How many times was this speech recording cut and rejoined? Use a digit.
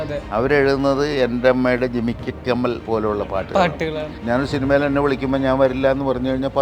1